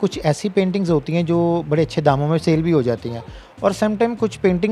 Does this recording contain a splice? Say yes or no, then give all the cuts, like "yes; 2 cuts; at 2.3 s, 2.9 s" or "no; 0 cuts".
no; 0 cuts